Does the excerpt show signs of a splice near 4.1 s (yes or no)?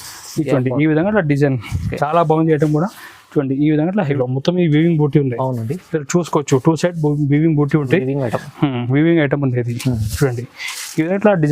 yes